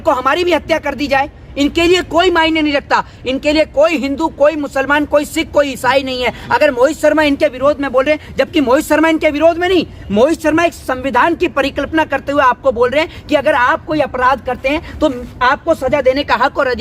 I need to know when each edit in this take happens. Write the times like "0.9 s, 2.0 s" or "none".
none